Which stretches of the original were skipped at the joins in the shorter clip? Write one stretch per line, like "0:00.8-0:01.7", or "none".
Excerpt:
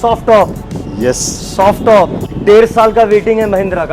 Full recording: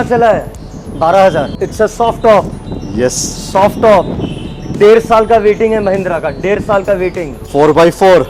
0:04.2-0:04.6